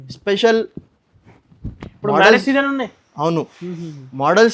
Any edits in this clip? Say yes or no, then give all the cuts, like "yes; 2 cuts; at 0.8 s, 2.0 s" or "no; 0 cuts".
no; 0 cuts